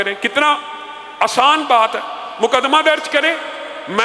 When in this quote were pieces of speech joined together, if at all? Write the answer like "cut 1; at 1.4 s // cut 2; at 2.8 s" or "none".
none

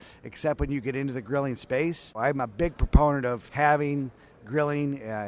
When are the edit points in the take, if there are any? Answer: cut 1; at 2.2 s // cut 2; at 3.5 s

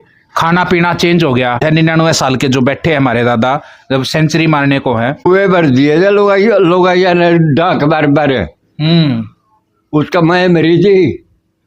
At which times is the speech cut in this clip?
cut 1; at 1.6 s // cut 2; at 5.3 s

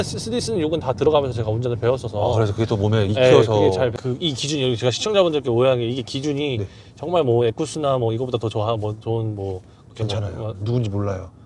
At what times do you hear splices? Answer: cut 1; at 3.9 s

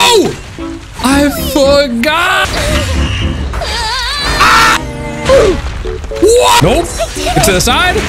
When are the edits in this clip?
none

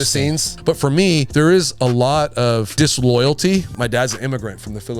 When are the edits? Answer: cut 1; at 0.9 s // cut 2; at 2.7 s // cut 3; at 3.7 s

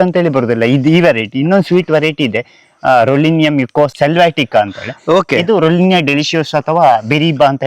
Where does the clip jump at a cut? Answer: cut 1; at 3.9 s

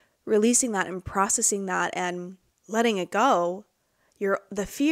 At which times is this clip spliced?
none

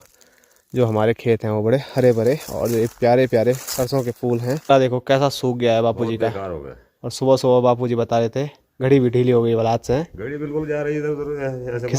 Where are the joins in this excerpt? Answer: cut 1; at 4.7 s

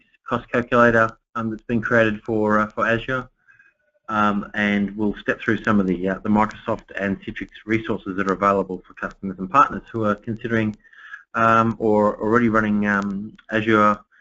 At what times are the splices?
cut 1; at 5.7 s

